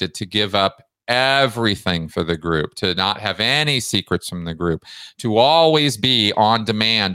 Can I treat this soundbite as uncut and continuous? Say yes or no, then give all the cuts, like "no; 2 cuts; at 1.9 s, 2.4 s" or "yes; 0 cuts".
yes; 0 cuts